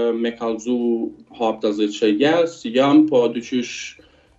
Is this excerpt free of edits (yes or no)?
yes